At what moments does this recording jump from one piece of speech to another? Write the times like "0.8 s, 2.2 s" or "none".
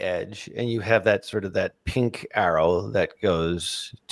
none